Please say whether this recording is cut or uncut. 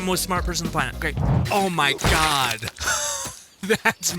cut